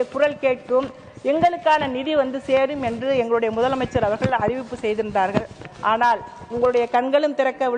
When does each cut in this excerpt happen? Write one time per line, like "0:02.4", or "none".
none